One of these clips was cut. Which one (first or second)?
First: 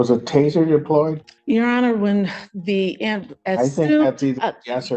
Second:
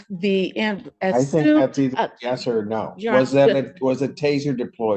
first